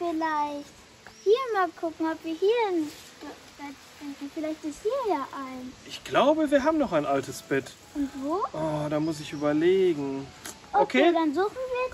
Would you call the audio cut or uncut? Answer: cut